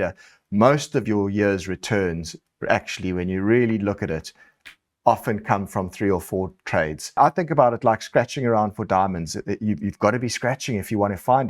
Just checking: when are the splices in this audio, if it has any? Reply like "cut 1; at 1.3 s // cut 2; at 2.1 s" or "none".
cut 1; at 7.2 s